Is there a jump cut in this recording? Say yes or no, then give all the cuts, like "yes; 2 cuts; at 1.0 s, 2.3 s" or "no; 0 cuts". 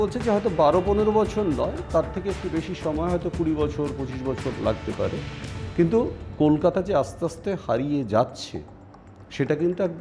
no; 0 cuts